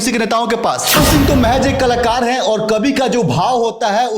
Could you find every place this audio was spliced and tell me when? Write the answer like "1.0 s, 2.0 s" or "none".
1.0 s